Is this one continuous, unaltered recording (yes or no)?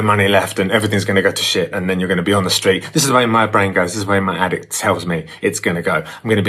yes